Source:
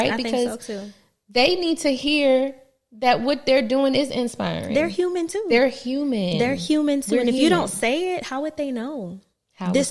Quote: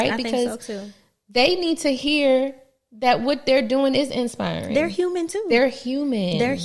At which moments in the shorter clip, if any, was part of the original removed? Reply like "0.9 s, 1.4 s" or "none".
none